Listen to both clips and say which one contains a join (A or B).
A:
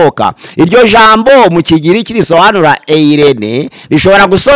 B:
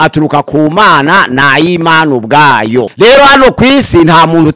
B